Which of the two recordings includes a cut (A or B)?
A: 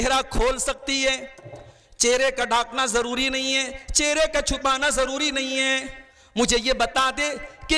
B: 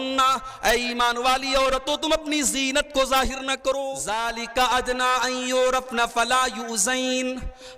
B